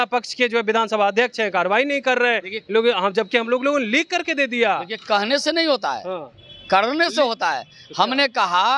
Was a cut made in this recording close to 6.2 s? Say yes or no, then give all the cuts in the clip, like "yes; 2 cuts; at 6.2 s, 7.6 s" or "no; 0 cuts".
no; 0 cuts